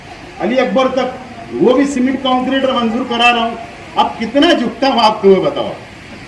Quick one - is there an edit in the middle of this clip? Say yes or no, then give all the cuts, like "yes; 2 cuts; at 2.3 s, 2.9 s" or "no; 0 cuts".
no; 0 cuts